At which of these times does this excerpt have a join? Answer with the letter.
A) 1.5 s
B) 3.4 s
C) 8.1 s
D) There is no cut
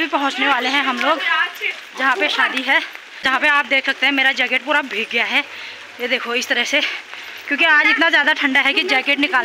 B